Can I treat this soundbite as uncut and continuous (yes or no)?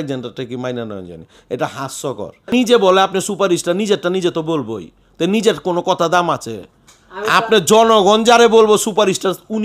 no